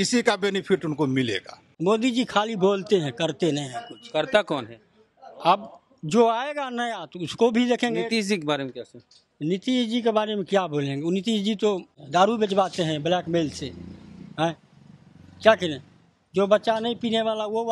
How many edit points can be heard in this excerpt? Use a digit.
2